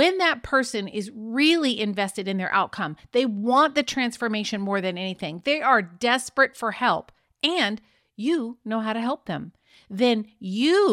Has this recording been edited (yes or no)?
no